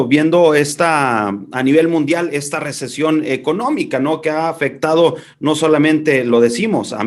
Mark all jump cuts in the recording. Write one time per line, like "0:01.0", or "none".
none